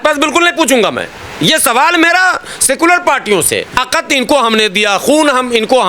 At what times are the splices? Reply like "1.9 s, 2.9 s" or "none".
3.8 s

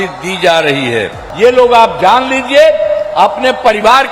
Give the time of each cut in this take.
1.2 s

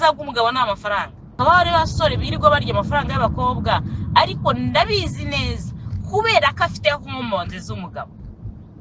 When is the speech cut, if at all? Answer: 1.3 s

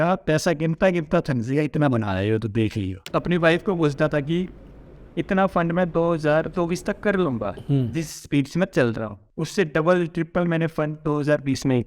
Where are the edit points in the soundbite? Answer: 3.0 s, 9.2 s

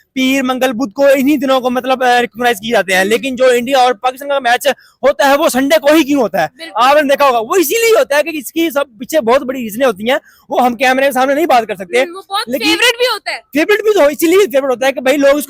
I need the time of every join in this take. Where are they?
none

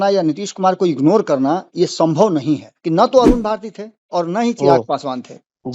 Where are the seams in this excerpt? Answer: 2.7 s

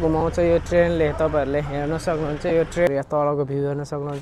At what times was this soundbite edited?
2.9 s

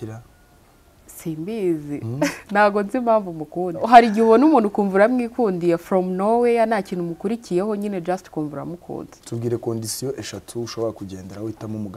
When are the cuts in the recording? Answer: 3.8 s, 9.1 s

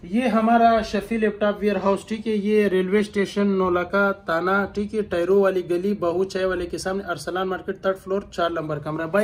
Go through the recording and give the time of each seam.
none

